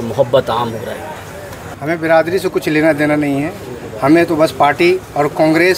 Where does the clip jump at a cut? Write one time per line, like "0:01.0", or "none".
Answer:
0:01.7